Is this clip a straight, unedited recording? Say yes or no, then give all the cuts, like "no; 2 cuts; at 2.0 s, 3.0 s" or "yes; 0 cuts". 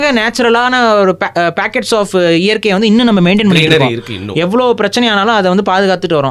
yes; 0 cuts